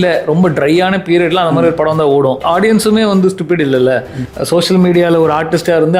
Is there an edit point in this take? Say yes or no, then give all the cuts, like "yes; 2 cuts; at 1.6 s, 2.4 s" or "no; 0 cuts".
yes; 2 cuts; at 2.4 s, 4.2 s